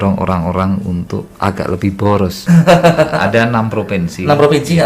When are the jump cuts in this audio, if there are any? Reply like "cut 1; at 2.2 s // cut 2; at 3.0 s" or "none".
cut 1; at 2.4 s